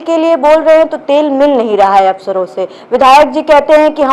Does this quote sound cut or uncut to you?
uncut